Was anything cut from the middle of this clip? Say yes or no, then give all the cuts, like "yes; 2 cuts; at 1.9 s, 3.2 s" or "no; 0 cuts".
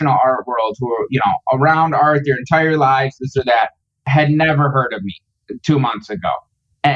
yes; 1 cut; at 4.0 s